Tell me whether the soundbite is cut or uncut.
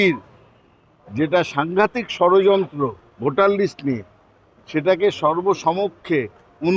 uncut